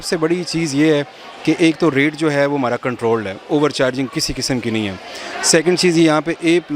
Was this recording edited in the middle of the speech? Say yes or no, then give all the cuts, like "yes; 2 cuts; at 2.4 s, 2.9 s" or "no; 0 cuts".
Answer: no; 0 cuts